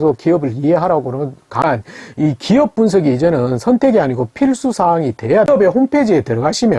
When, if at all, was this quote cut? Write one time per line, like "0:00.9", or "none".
0:01.6
0:05.5